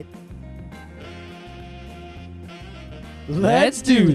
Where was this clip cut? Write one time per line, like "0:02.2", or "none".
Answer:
none